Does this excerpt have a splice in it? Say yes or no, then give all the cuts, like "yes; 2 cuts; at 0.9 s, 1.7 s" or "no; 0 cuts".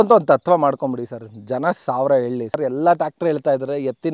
yes; 1 cut; at 2.6 s